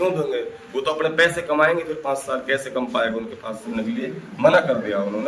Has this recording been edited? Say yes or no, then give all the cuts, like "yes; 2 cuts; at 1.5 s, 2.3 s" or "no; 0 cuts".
yes; 1 cut; at 3.7 s